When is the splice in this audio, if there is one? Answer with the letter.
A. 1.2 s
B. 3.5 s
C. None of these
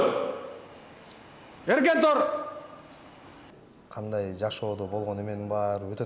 B